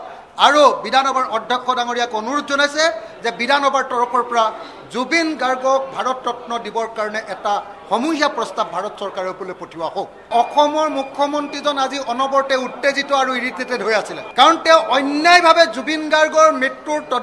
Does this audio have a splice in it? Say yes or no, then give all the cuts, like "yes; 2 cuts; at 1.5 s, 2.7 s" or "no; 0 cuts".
yes; 2 cuts; at 10.3 s, 14.2 s